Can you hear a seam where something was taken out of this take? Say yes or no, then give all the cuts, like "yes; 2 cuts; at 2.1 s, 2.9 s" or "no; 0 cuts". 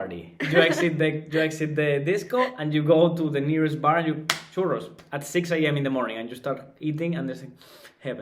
no; 0 cuts